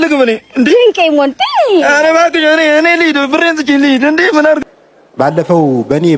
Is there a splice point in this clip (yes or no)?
yes